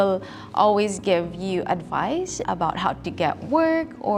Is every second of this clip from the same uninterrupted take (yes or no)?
yes